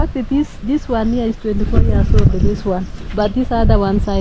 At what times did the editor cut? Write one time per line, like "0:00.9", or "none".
none